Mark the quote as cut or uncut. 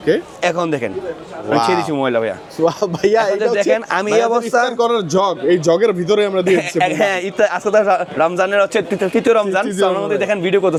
uncut